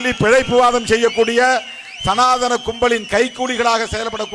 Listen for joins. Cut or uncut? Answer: uncut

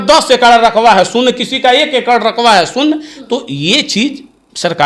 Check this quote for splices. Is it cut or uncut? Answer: uncut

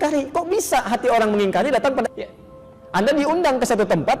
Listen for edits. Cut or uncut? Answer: cut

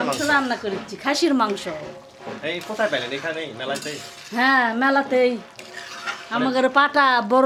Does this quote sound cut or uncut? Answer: uncut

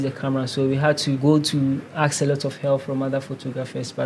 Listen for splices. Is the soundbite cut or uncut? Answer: uncut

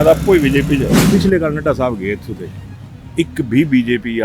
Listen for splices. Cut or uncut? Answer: cut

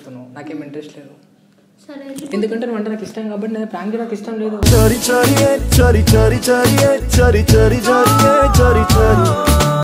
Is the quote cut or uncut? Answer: uncut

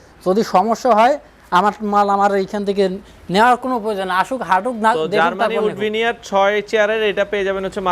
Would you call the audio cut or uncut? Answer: uncut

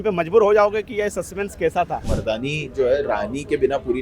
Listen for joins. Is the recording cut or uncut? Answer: cut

